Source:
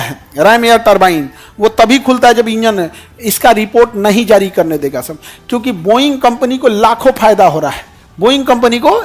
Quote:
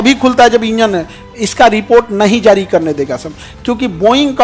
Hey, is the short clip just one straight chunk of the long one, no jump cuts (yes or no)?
yes